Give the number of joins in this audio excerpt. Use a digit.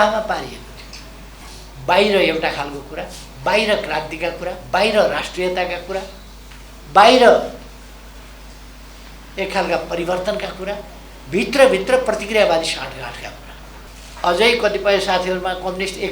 2